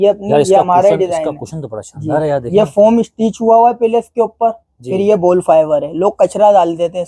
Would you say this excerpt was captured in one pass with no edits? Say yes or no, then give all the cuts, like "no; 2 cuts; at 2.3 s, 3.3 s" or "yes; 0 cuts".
yes; 0 cuts